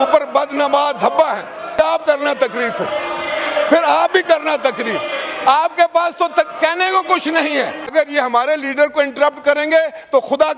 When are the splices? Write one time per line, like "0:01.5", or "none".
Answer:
0:01.8
0:07.9